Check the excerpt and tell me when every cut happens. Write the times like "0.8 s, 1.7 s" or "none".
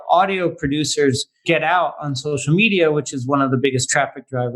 1.3 s

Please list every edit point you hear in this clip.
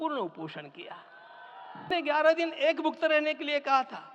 1.9 s

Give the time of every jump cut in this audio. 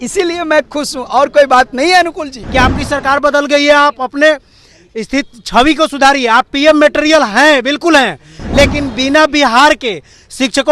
2.3 s

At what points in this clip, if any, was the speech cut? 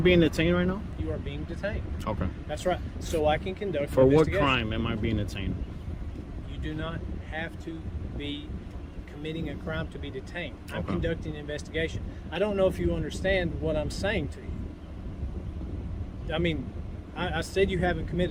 none

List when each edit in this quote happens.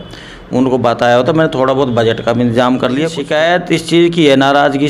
3.2 s

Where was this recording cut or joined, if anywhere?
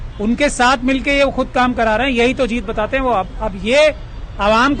none

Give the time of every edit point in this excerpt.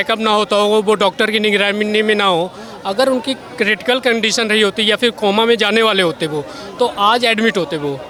none

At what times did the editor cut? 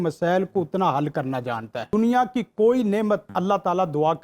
1.8 s, 3.3 s

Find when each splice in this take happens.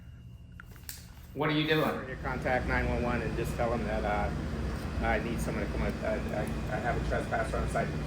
2.2 s

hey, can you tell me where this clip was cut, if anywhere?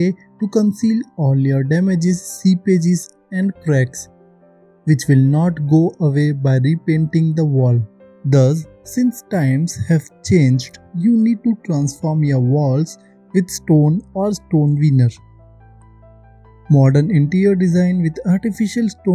none

